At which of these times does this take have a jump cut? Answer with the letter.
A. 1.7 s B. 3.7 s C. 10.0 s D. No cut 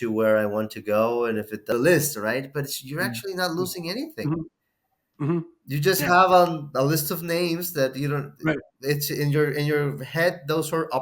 A